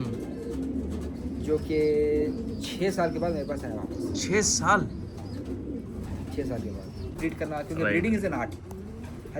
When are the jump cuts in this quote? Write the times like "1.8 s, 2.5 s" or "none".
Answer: 7.2 s